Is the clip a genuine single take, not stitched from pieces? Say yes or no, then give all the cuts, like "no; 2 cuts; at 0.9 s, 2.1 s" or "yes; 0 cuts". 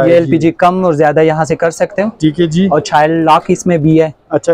yes; 0 cuts